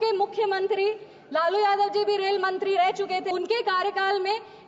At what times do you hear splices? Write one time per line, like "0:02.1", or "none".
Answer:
0:03.3